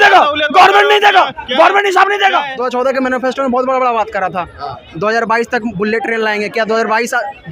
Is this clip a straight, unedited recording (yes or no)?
no